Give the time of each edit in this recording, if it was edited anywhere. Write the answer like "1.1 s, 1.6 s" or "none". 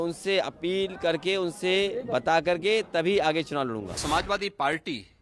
3.9 s